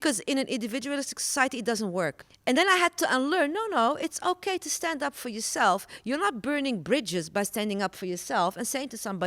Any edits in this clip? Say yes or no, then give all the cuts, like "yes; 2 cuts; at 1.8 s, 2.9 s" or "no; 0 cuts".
yes; 1 cut; at 2.2 s